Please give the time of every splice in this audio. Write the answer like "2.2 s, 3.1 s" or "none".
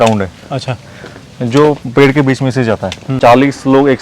3.1 s